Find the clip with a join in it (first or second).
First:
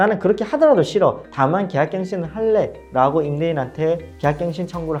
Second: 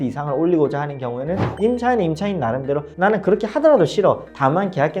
second